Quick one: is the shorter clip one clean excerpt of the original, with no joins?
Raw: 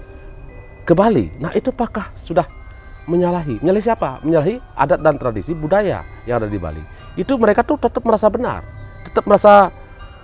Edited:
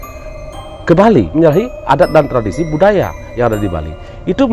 no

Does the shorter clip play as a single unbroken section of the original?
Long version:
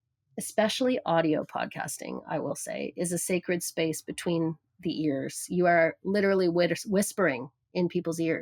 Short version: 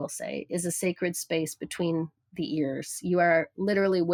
yes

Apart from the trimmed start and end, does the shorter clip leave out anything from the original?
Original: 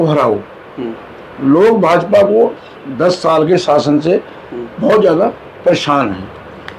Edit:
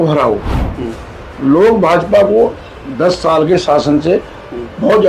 no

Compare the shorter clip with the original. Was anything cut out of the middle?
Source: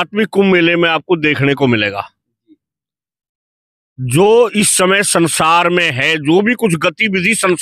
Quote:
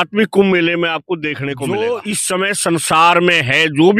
yes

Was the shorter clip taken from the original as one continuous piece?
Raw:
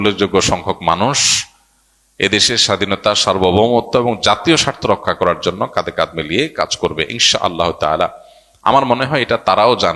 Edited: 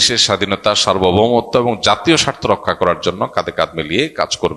yes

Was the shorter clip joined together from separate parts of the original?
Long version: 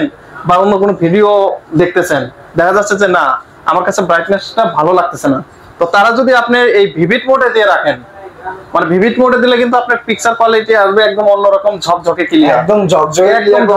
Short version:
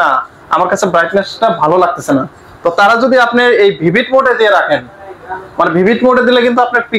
no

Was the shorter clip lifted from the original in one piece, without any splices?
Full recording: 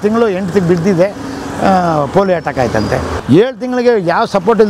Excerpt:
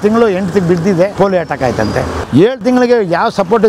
no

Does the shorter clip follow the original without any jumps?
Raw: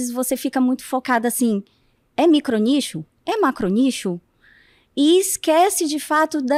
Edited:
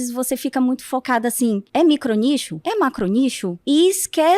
no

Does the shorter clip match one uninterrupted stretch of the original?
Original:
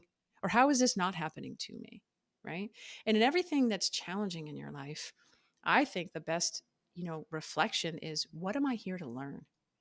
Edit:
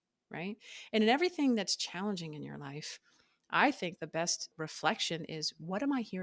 no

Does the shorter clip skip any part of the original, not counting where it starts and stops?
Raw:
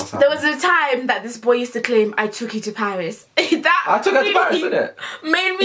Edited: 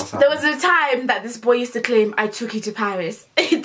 no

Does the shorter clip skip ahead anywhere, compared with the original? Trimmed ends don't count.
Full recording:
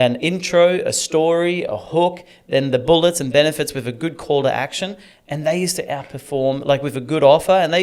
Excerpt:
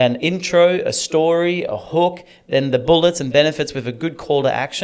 no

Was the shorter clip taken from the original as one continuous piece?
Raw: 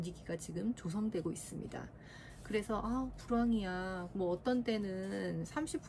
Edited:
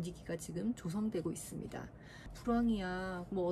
no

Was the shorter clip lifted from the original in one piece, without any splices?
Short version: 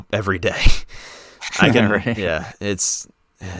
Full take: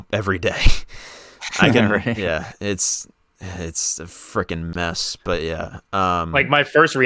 yes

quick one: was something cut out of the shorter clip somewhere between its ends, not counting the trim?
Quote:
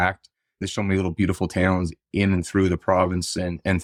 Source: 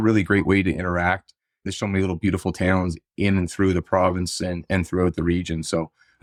no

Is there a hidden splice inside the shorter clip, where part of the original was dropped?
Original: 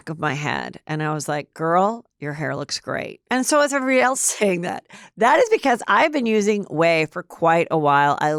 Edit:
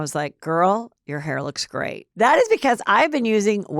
yes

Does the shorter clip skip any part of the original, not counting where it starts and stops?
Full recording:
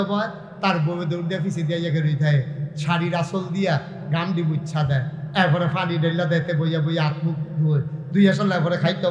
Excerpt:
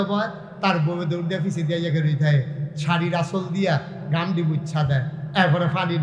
no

